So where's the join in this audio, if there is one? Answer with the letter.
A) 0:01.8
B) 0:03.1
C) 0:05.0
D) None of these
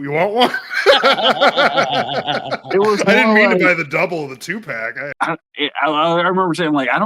C